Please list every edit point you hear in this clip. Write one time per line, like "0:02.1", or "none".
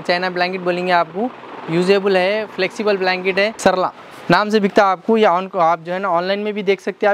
0:03.6